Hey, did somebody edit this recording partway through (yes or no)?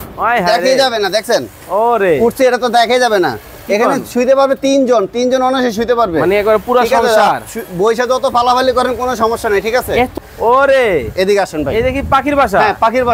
yes